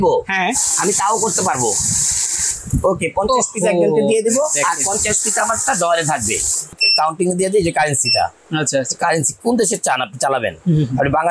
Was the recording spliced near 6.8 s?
yes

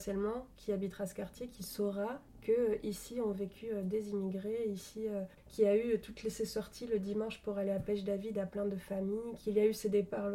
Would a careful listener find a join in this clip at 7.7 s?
no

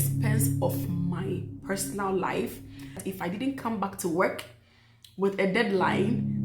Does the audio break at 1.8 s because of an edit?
no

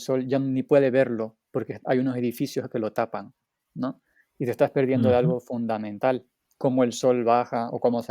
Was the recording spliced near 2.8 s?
no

